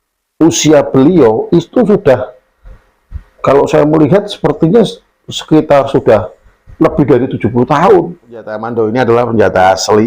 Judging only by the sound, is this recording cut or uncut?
cut